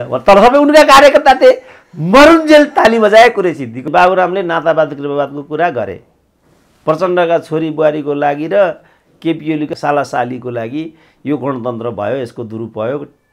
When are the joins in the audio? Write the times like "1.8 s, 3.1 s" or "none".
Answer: 3.8 s, 9.7 s

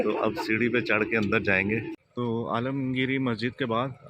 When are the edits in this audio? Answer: 2.0 s

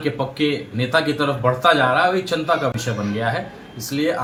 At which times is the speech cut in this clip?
none

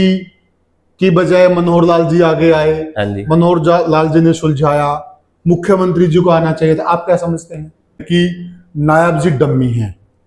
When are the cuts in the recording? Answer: 8.0 s

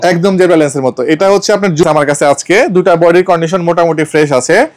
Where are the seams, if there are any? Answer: 1.8 s

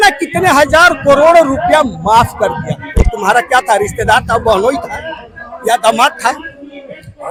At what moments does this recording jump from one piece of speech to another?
none

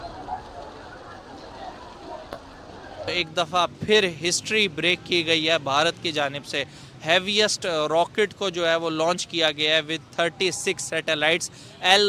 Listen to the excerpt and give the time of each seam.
3.2 s

